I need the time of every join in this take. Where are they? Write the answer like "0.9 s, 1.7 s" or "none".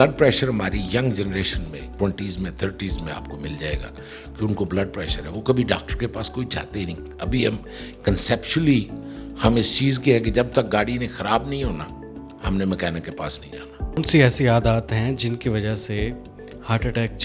1.9 s, 14.0 s